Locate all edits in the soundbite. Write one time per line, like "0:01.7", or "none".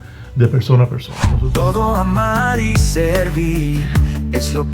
0:01.4

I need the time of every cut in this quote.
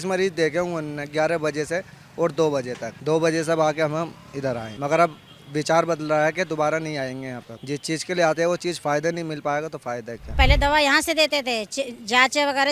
0:02.9
0:04.7
0:07.5
0:10.3

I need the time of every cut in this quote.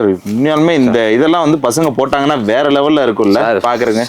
none

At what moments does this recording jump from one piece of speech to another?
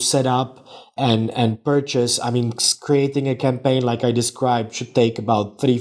none

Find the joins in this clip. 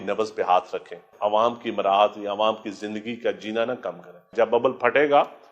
0:01.1
0:03.7

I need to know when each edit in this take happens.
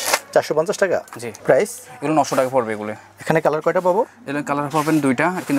0:01.2

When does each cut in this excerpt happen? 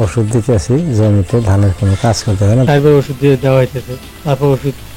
0:02.7

